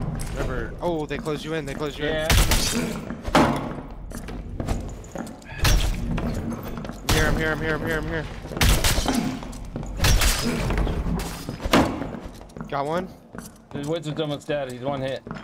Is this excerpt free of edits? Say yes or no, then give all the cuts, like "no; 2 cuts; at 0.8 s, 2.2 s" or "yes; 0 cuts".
yes; 0 cuts